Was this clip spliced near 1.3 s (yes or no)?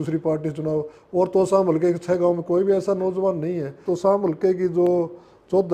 no